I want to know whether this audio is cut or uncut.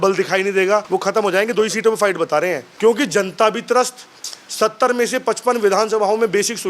cut